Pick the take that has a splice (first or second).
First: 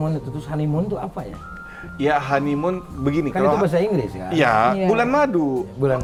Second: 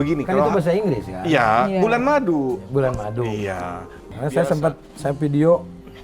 second